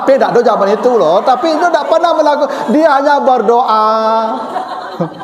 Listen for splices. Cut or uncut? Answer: uncut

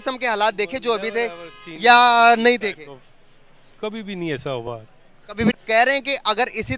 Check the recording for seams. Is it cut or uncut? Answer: cut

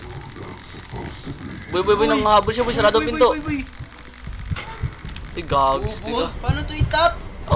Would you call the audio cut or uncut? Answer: cut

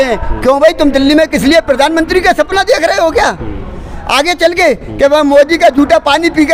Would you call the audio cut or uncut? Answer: uncut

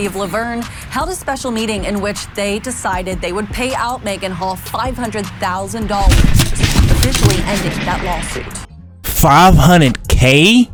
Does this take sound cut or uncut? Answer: uncut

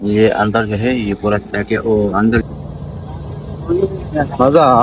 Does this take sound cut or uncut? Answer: cut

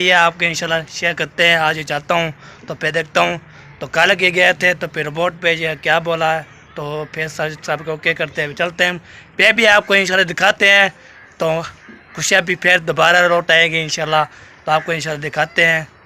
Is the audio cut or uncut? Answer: uncut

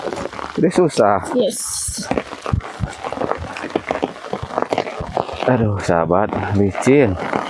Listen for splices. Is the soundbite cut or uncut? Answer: uncut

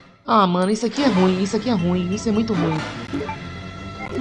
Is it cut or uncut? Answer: uncut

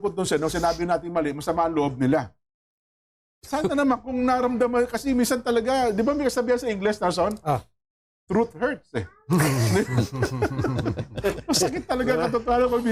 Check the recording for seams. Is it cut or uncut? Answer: uncut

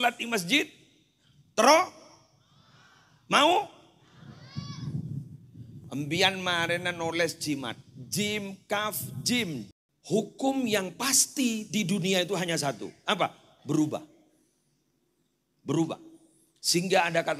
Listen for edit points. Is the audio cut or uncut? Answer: cut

